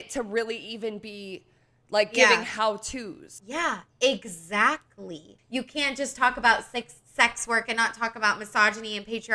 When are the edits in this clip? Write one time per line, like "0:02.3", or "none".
0:03.3
0:05.3

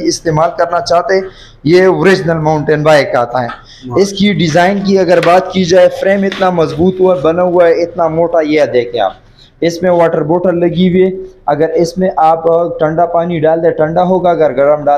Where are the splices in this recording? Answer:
none

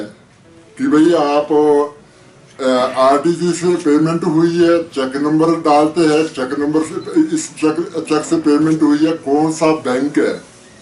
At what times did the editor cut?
none

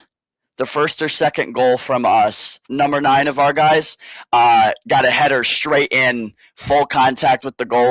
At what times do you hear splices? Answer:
0:02.6

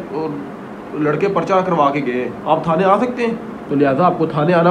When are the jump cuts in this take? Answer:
0:02.4
0:03.5

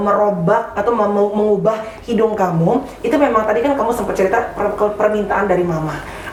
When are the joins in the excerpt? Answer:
none

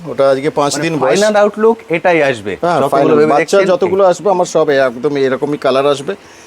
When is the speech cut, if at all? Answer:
0:01.1

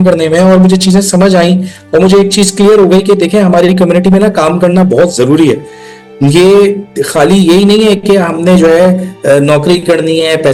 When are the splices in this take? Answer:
none

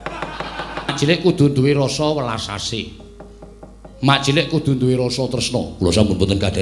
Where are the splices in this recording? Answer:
0:00.9

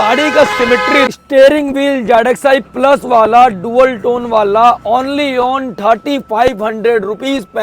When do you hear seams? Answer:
0:01.2

